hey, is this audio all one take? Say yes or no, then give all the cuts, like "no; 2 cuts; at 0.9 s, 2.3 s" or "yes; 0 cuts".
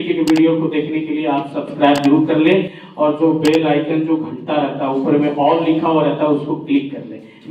yes; 0 cuts